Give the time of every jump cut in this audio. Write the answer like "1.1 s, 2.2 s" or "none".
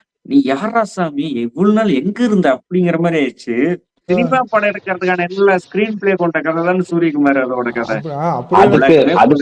4.1 s